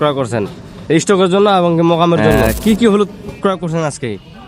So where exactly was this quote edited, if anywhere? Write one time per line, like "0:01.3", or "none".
0:02.3